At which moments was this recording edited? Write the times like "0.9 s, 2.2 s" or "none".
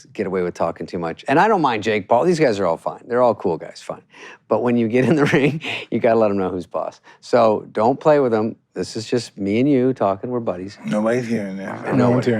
1.2 s